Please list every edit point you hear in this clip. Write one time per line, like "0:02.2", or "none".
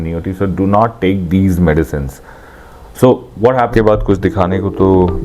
0:03.7